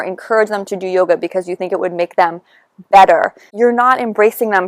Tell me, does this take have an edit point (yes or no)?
yes